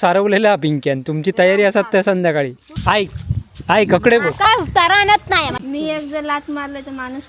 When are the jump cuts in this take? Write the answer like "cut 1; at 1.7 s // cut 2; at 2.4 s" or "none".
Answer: cut 1; at 2.7 s // cut 2; at 5.6 s